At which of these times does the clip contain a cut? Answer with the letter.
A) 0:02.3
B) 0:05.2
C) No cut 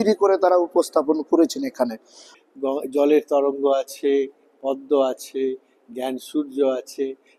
A